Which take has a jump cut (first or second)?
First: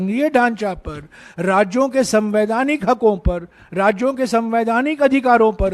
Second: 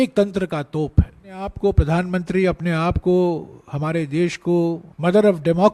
second